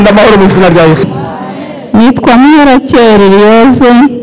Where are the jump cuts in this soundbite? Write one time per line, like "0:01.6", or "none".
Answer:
0:01.1